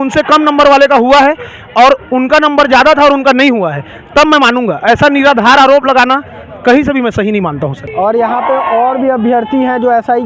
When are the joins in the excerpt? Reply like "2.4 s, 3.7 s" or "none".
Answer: none